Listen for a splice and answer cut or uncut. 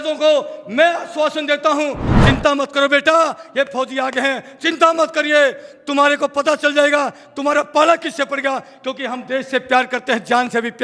cut